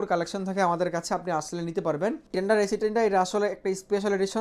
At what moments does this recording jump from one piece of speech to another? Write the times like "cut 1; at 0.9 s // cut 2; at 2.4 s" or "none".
cut 1; at 2.2 s